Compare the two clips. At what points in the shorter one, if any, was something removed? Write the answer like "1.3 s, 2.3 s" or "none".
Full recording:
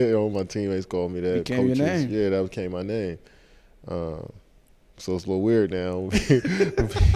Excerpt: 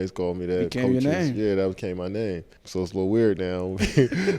2.5 s